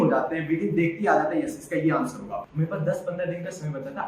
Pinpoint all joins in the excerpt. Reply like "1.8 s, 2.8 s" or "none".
2.4 s